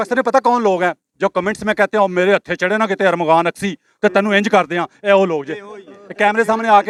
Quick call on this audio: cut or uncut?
uncut